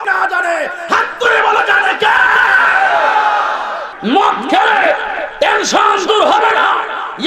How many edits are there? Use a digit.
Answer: 1